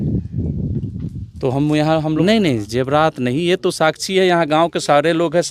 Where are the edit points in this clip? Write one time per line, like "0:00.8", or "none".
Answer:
0:02.2